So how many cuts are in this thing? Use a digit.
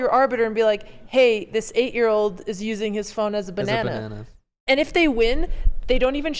1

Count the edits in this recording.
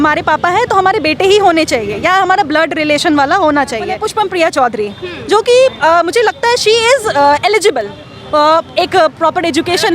1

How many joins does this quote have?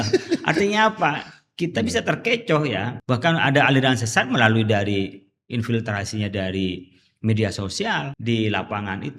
2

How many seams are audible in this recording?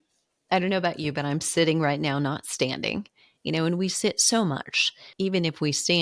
1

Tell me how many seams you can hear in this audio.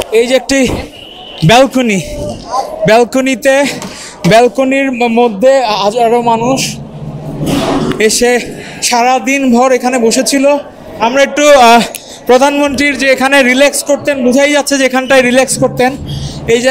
0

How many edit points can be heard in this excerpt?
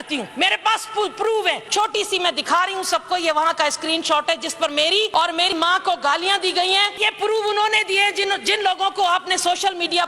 3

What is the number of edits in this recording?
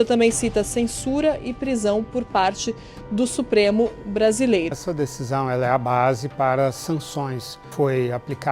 2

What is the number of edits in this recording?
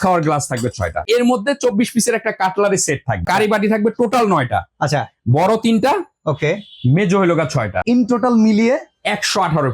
3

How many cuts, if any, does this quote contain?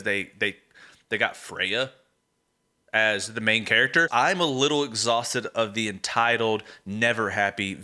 1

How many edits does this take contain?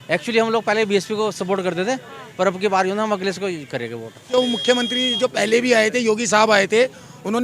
1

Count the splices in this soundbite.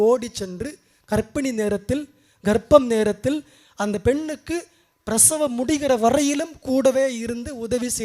0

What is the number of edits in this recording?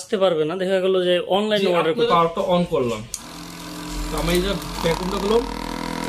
1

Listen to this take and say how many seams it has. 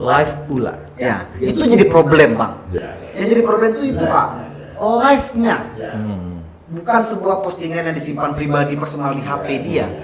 0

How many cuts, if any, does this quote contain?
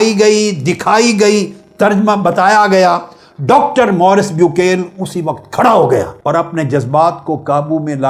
1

